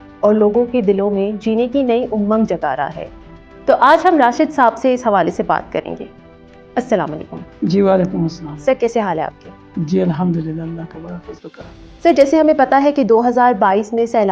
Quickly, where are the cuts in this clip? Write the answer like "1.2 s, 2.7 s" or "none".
none